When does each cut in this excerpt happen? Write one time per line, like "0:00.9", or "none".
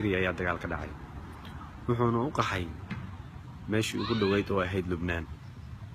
0:04.4